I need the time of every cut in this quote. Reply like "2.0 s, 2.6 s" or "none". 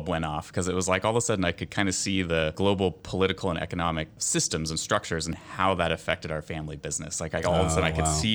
5.4 s